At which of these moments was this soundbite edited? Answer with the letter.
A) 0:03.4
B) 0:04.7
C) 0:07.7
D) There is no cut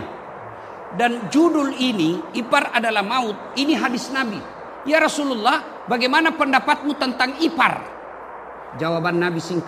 B